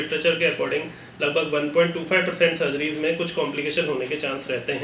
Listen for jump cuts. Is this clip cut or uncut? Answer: uncut